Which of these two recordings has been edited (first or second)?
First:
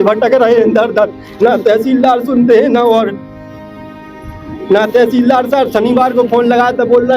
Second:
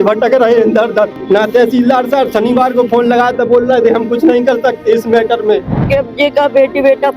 second